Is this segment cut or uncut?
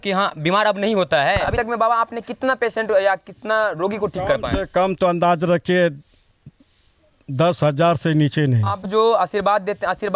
cut